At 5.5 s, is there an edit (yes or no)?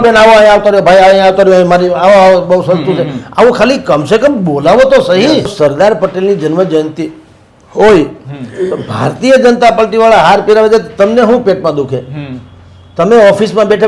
yes